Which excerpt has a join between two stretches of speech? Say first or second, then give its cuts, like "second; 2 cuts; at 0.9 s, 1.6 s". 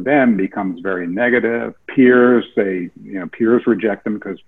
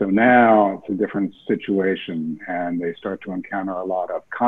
first; 1 cut; at 1.8 s